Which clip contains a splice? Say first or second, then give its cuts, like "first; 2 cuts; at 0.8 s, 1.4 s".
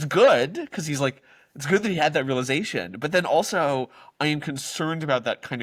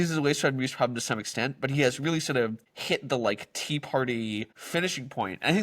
second; 2 cuts; at 2.7 s, 4.6 s